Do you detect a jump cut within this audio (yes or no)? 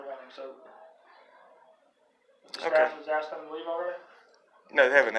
no